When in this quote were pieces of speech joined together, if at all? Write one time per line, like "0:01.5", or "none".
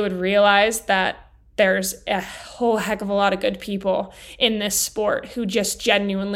none

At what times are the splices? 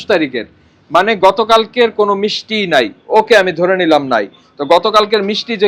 none

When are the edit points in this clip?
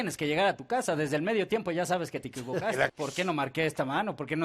0:02.9

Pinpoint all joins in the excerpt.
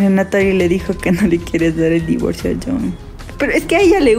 0:03.2

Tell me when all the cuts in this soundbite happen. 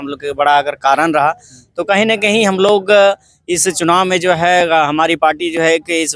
none

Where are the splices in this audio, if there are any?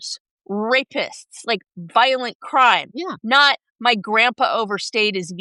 none

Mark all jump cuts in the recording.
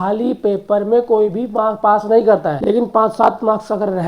0:02.5

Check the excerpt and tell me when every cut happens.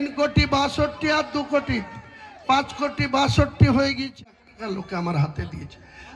0:04.2

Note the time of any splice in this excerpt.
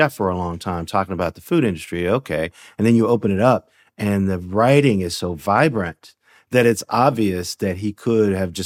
none

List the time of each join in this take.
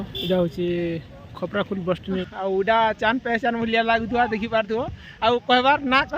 0:02.3

